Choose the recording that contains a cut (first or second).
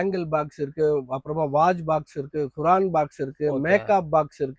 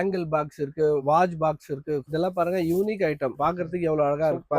second